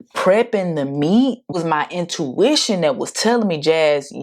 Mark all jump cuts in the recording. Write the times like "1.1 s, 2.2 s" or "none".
1.5 s